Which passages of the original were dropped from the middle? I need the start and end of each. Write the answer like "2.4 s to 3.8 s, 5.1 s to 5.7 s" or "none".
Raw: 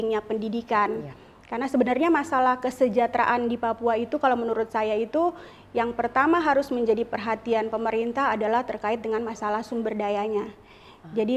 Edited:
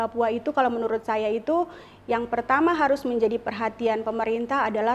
none